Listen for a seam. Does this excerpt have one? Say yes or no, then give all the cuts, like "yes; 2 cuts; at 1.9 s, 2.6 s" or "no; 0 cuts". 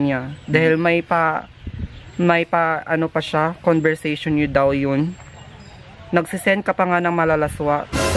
no; 0 cuts